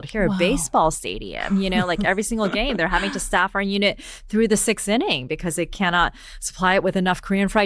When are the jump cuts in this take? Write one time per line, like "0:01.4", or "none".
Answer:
none